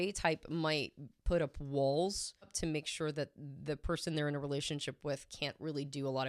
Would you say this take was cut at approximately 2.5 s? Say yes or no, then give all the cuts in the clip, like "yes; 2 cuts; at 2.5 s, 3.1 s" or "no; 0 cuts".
yes; 1 cut; at 2.5 s